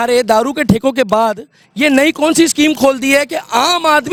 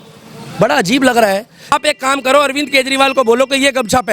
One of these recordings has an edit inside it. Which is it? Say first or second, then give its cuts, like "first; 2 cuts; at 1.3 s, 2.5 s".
second; 1 cut; at 1.7 s